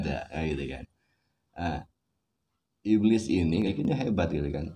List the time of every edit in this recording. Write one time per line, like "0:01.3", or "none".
0:03.7